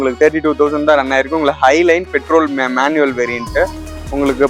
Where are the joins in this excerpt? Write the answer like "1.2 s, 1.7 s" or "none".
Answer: none